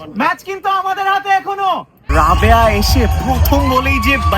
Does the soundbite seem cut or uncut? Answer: cut